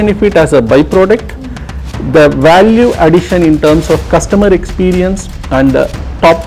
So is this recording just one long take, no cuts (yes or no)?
yes